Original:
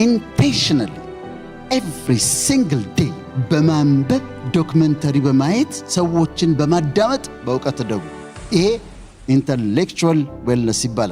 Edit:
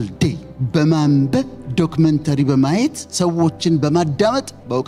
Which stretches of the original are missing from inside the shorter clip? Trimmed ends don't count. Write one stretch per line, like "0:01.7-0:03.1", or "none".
none